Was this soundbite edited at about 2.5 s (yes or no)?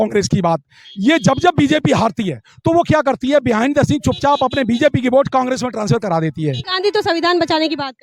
no